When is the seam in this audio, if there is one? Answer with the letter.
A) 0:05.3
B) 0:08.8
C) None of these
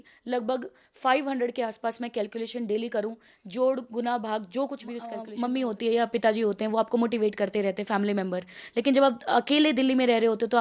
A